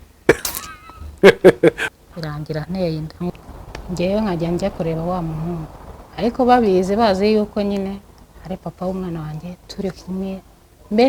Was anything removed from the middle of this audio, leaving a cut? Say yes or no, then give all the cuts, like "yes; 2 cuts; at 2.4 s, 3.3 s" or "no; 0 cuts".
yes; 2 cuts; at 1.8 s, 3.3 s